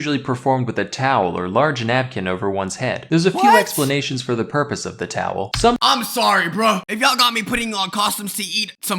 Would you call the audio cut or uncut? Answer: uncut